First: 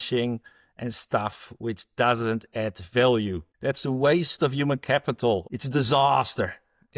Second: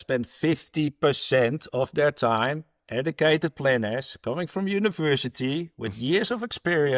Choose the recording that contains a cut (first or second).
first